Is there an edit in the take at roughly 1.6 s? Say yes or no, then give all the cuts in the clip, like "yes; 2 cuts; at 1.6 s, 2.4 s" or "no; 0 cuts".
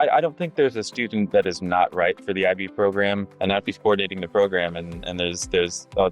no; 1 cut; at 3.3 s